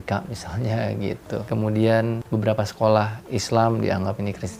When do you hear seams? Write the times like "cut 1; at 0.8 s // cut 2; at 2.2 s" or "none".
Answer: cut 1; at 1.4 s // cut 2; at 2.2 s